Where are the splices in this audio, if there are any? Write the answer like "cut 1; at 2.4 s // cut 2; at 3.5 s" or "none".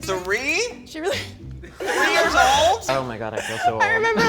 cut 1; at 2.9 s